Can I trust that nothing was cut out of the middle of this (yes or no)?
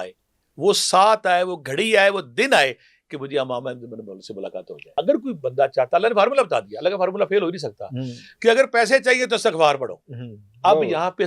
no